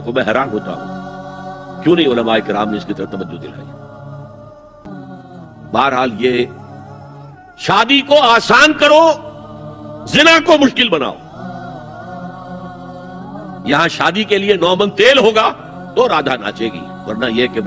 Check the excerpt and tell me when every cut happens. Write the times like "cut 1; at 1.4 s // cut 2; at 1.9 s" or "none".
cut 1; at 4.9 s

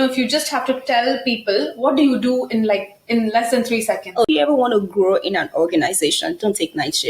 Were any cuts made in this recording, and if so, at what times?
cut 1; at 4.3 s

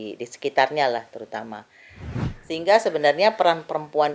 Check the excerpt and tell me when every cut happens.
cut 1; at 2.1 s

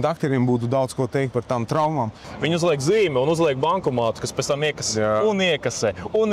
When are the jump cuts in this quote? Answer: cut 1; at 2.3 s

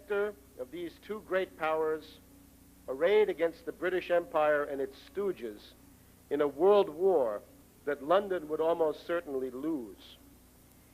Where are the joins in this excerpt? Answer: cut 1; at 5.0 s

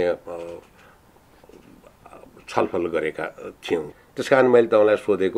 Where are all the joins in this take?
cut 1; at 3.9 s

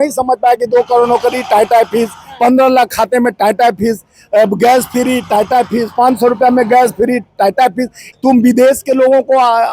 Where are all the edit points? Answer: cut 1; at 8.0 s

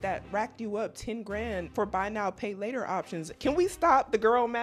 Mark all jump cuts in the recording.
cut 1; at 1.7 s // cut 2; at 3.3 s

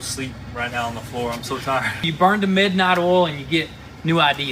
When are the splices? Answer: cut 1; at 2.0 s

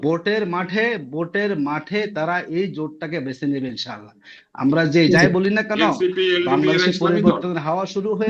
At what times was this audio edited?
none

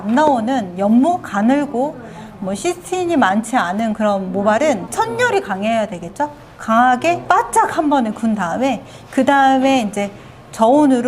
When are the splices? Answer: cut 1; at 4.9 s // cut 2; at 7.2 s

